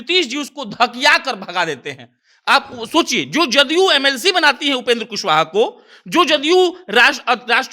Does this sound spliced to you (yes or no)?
no